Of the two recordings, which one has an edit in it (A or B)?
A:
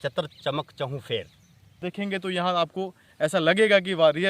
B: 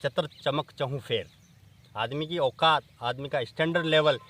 A